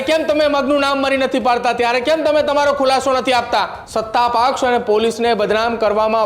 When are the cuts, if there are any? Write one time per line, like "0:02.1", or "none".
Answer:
0:03.8